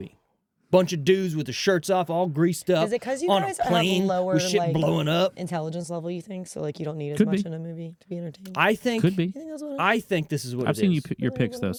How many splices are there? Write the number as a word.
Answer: zero